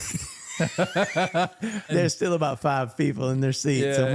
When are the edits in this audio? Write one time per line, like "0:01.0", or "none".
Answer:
0:01.9